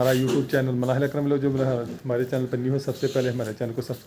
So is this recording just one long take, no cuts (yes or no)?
yes